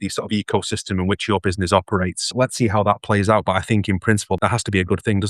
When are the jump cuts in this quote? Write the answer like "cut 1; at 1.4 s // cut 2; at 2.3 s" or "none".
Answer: cut 1; at 2.2 s // cut 2; at 4.4 s